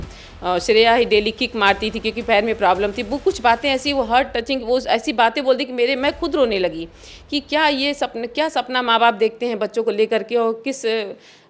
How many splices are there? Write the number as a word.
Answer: zero